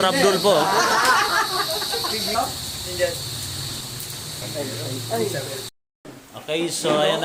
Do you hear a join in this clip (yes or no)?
no